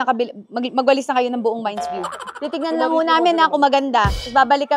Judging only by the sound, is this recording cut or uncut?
uncut